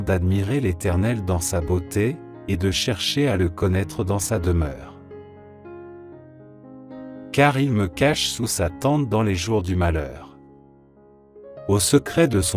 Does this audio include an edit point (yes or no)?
yes